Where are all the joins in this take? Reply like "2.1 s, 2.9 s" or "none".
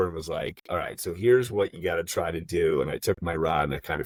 none